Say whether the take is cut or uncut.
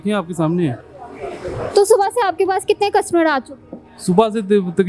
uncut